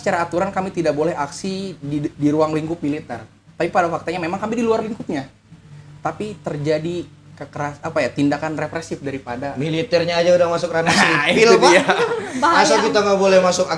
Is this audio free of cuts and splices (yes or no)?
yes